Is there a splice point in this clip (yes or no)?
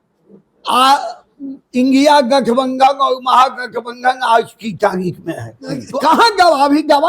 yes